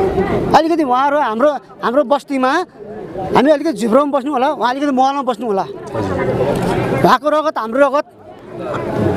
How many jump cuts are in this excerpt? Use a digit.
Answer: 0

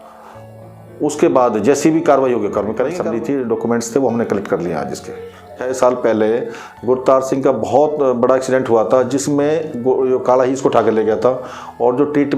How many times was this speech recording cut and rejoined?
2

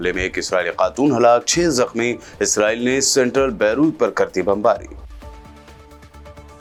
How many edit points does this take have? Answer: 0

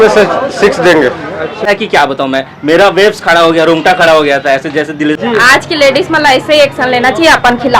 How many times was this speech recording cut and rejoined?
2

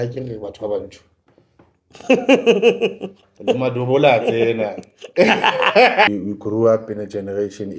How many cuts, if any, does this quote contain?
1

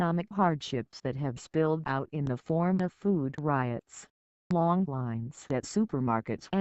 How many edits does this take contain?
1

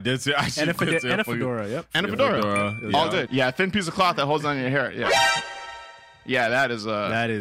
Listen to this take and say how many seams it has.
1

